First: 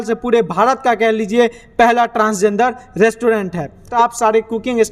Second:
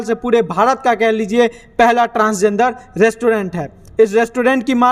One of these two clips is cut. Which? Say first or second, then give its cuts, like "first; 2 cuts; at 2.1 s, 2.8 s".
first; 1 cut; at 3.9 s